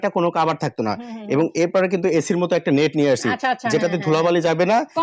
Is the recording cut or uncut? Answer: uncut